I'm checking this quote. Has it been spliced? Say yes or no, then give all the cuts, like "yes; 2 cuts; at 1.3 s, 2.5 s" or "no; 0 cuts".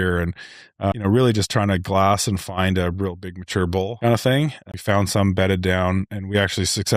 yes; 3 cuts; at 0.9 s, 3.9 s, 4.6 s